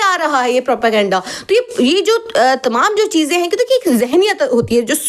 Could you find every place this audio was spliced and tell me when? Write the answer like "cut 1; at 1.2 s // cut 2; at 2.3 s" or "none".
none